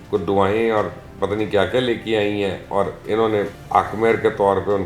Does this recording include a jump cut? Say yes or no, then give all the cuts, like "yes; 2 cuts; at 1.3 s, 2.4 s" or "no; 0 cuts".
yes; 1 cut; at 3.6 s